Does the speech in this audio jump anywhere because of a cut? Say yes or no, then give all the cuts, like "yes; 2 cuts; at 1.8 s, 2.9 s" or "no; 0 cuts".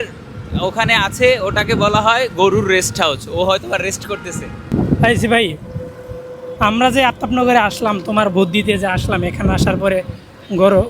yes; 1 cut; at 4.5 s